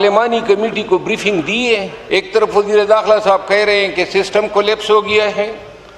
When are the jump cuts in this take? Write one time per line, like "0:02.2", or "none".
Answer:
0:02.0